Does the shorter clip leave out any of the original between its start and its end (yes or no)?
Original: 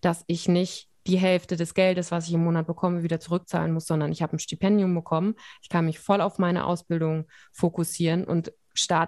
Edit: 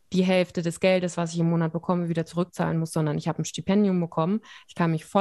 no